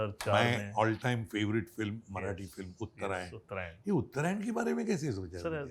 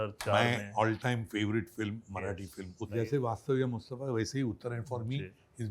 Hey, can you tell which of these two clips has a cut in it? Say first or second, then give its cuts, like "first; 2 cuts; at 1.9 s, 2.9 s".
second; 1 cut; at 2.8 s